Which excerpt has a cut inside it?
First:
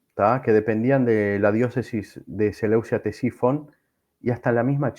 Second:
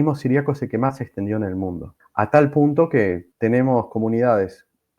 second; 2 cuts; at 2.0 s, 3.3 s

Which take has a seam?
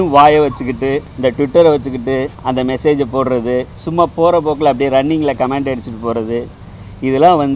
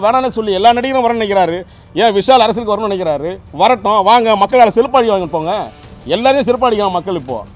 first; 3 cuts; at 1.1 s, 2.3 s, 3.8 s

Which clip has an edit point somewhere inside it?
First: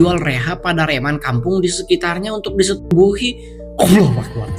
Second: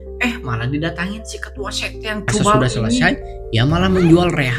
second; 1 cut; at 3.0 s

